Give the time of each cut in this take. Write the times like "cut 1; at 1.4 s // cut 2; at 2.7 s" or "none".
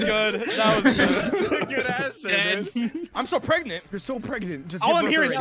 cut 1; at 3.1 s